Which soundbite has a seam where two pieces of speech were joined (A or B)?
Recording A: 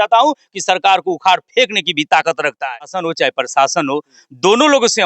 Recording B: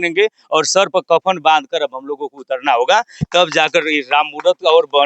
A